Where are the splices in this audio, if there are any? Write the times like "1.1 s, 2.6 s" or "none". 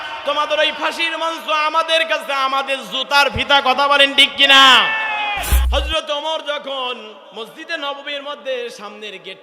5.5 s